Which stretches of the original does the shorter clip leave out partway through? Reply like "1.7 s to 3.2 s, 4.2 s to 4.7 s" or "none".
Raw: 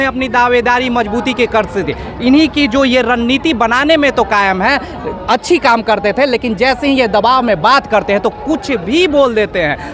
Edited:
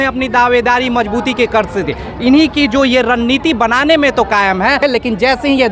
4.8 s to 6.2 s